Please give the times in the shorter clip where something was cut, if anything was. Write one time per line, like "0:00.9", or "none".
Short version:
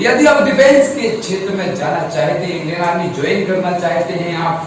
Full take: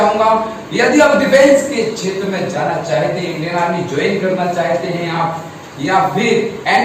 none